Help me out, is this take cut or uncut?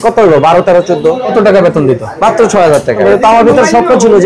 cut